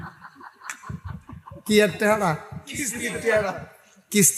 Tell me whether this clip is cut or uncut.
uncut